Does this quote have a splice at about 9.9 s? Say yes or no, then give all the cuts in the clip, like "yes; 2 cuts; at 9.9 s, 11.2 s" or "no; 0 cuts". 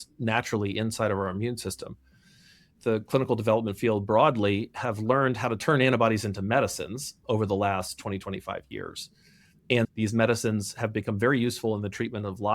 yes; 2 cuts; at 2.7 s, 9.9 s